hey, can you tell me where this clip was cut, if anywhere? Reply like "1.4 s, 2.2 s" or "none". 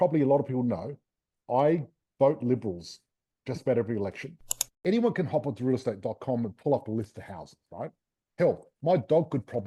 4.8 s